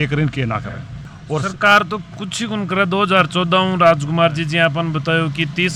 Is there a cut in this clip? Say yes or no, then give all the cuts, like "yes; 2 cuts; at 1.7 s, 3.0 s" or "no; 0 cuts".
no; 0 cuts